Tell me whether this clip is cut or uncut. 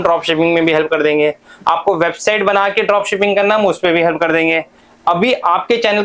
uncut